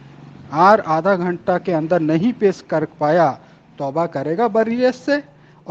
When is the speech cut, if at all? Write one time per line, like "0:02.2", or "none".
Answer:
0:04.5